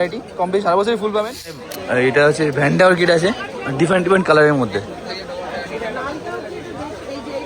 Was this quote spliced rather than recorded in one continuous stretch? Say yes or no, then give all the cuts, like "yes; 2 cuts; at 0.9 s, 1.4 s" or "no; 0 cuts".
yes; 1 cut; at 1.6 s